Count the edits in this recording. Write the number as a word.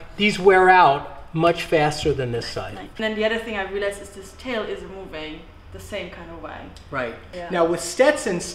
one